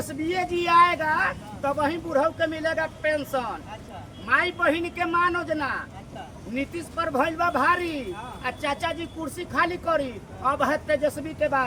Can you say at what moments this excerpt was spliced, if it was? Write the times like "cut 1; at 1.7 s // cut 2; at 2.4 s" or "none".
none